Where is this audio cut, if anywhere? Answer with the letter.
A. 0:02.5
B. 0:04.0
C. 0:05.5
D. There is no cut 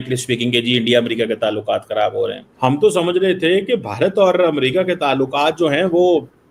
A